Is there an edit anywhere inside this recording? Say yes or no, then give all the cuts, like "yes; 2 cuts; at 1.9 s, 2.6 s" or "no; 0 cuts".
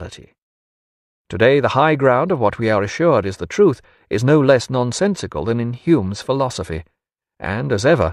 yes; 1 cut; at 5.3 s